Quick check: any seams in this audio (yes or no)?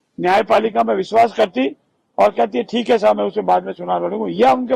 no